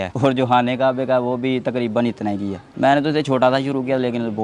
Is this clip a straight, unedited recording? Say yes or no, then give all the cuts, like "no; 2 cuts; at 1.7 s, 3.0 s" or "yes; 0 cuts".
no; 1 cut; at 2.7 s